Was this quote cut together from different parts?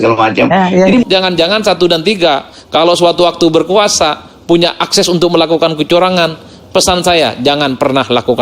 yes; 1 cut; at 1.0 s

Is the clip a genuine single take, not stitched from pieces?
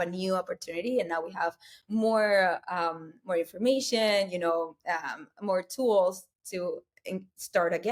yes; 0 cuts

